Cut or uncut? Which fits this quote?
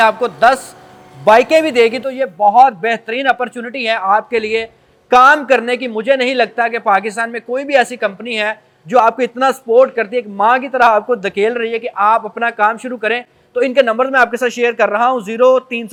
uncut